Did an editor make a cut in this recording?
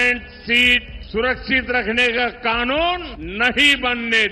yes; 2 cuts; at 0.9 s, 3.2 s

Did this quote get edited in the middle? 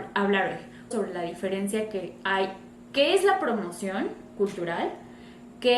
yes; 1 cut; at 0.9 s

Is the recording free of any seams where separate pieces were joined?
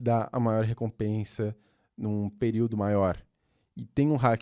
yes; 0 cuts

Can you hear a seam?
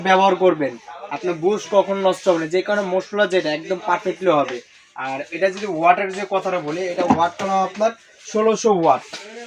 no; 0 cuts

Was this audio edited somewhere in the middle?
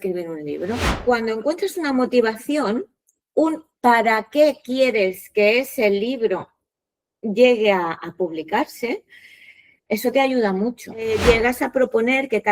yes; 2 cuts; at 0.9 s, 11.1 s

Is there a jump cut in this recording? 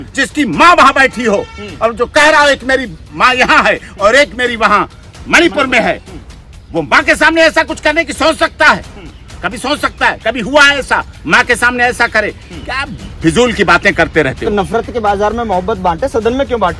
no; 0 cuts

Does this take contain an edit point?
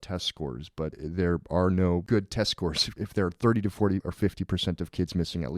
yes; 4 cuts; at 1.0 s, 2.0 s, 2.9 s, 4.1 s

